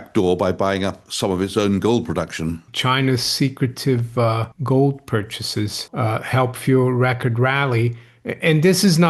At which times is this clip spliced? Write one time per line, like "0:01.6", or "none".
0:02.7
0:04.5
0:05.8